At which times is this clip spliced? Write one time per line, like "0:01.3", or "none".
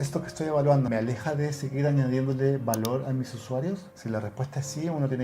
0:00.9
0:03.9